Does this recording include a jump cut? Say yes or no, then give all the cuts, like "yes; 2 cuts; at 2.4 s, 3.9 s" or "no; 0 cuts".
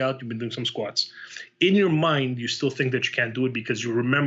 no; 0 cuts